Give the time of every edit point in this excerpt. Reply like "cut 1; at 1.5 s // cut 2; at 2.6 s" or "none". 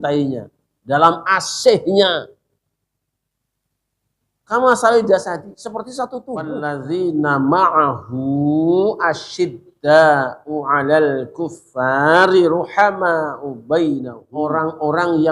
cut 1; at 6.6 s // cut 2; at 14.2 s